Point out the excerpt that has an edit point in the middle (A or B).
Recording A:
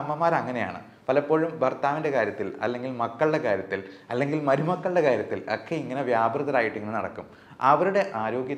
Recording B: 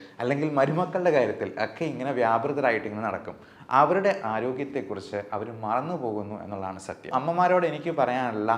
B